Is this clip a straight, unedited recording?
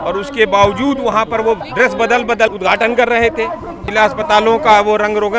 no; 2 cuts; at 2.5 s, 3.8 s

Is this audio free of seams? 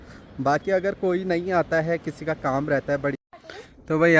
no; 1 cut; at 3.2 s

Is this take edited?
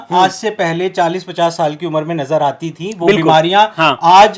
no; 0 cuts

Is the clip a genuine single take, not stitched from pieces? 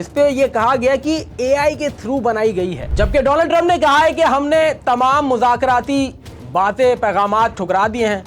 no; 1 cut; at 2.8 s

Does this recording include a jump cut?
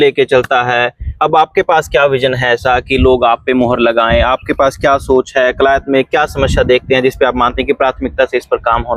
no; 0 cuts

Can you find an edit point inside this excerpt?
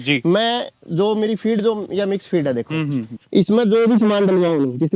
yes; 1 cut; at 3.1 s

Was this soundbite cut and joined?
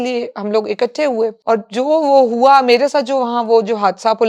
yes; 1 cut; at 1.4 s

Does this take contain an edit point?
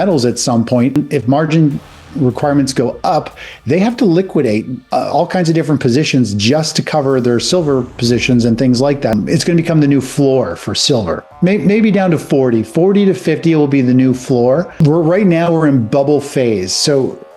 yes; 3 cuts; at 1.0 s, 9.1 s, 14.8 s

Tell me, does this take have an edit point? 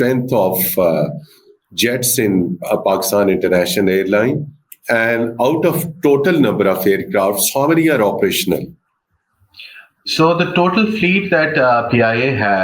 no; 0 cuts

